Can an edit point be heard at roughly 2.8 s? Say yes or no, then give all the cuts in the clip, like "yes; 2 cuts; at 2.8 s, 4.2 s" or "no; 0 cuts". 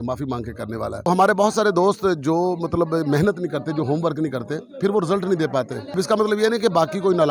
no; 2 cuts; at 1.1 s, 6.0 s